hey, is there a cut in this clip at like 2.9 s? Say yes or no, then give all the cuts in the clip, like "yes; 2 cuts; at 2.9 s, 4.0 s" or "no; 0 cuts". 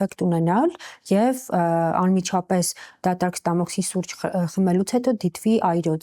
no; 0 cuts